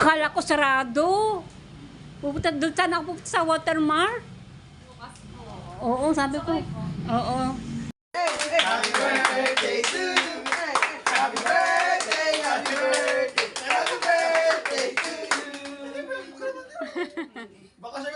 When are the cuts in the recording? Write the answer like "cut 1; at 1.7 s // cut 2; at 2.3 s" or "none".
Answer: cut 1; at 8.0 s